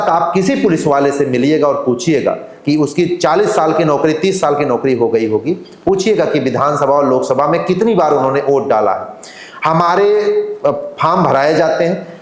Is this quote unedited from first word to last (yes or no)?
yes